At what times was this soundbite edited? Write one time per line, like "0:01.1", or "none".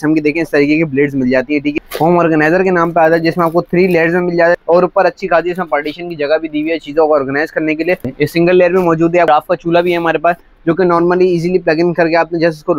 0:01.7
0:04.6
0:08.1
0:09.3